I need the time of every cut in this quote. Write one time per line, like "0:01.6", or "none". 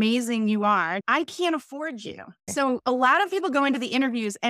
0:01.0
0:02.5